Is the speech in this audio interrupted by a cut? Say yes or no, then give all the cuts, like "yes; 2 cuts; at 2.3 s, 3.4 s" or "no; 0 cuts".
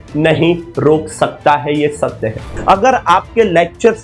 yes; 1 cut; at 2.5 s